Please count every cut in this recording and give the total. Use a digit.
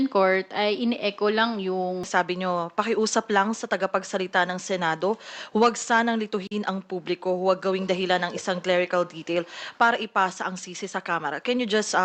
1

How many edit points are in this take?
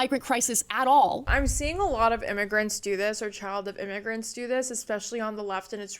1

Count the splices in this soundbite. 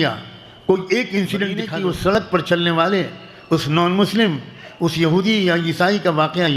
1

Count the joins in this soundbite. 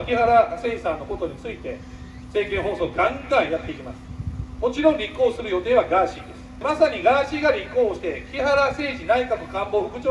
1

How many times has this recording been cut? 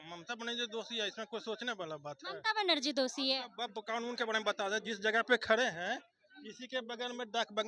0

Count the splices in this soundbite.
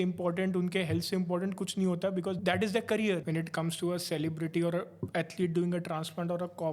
2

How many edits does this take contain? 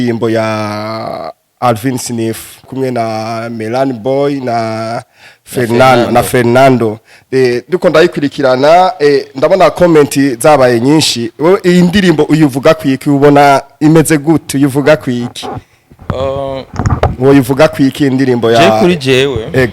1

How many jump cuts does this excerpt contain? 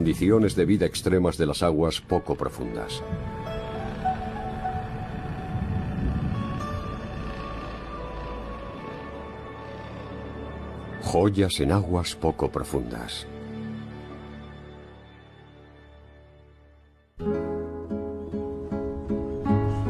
1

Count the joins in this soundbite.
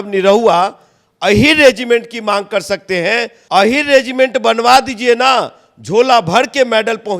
1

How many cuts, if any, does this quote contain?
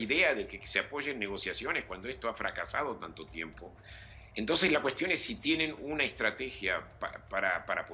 1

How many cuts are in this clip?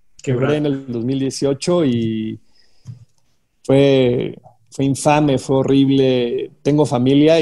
0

